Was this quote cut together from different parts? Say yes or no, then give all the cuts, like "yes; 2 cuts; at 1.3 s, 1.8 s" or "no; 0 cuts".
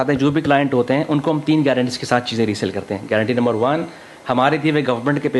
no; 0 cuts